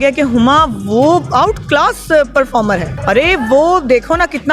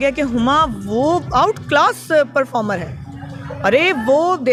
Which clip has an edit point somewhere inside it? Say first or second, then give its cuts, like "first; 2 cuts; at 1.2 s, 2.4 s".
first; 1 cut; at 2.9 s